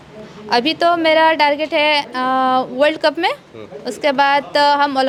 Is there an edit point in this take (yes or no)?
no